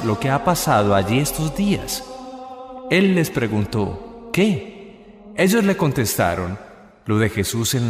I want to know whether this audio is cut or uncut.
uncut